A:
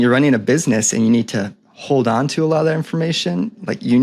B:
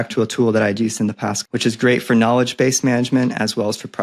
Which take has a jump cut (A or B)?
B